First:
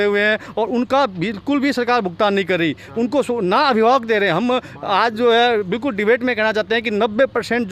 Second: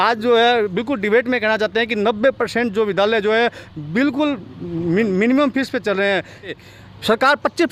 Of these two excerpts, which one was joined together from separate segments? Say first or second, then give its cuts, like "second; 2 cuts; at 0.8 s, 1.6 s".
second; 1 cut; at 6.5 s